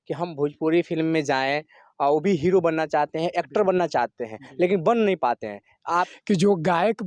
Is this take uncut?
no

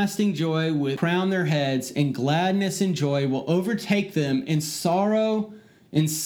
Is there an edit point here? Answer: yes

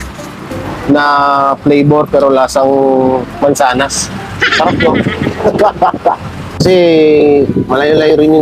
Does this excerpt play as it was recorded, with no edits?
no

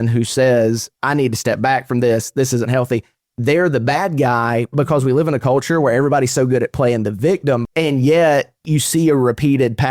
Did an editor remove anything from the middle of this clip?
yes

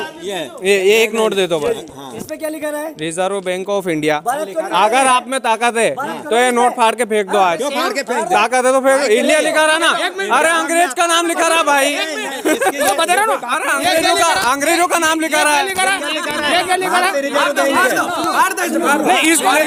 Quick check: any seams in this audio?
no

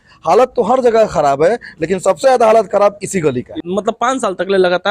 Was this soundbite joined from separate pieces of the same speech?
yes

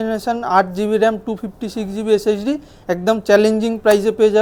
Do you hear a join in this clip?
no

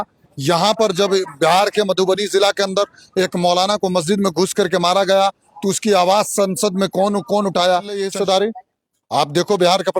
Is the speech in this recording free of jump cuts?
no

